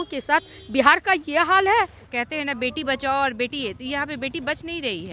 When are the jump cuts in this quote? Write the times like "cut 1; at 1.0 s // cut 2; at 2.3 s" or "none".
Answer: cut 1; at 2.0 s

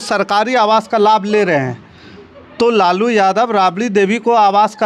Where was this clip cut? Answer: none

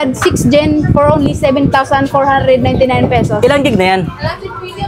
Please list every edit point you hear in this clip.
none

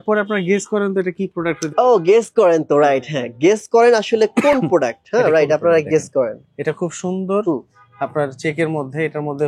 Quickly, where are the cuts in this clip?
none

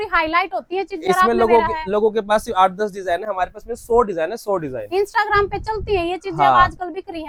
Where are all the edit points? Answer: none

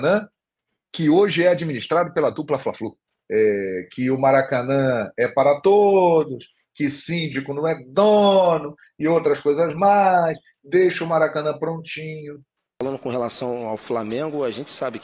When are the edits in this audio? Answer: cut 1; at 3.1 s // cut 2; at 12.8 s

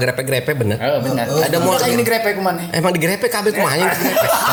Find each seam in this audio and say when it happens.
none

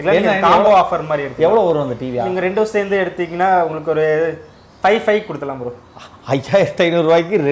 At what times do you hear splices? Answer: none

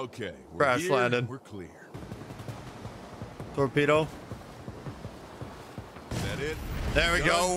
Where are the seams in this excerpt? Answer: cut 1; at 1.9 s

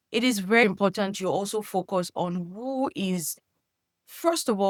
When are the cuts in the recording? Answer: none

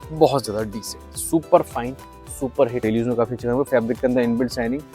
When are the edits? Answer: cut 1; at 2.8 s

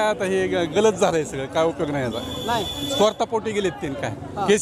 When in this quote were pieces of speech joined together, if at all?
none

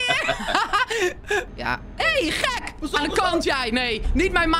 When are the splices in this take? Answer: cut 1; at 1.5 s

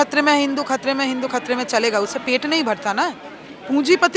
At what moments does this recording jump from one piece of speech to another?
cut 1; at 3.2 s

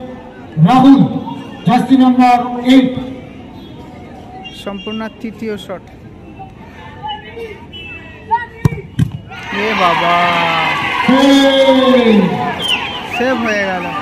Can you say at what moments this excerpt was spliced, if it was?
cut 1; at 6.7 s

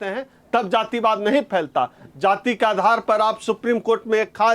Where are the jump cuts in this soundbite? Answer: none

